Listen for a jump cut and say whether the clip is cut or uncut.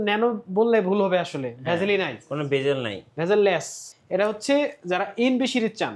cut